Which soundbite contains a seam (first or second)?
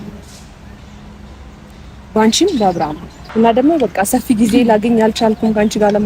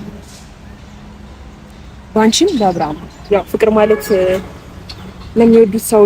second